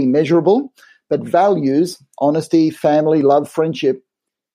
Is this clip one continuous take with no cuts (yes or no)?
yes